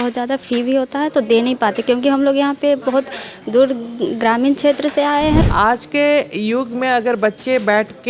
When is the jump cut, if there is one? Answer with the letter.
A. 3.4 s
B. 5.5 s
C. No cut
B